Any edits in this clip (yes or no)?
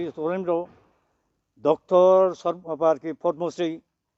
no